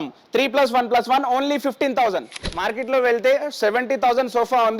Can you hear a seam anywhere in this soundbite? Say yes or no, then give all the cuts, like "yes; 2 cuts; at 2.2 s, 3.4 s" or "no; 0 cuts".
yes; 1 cut; at 2.4 s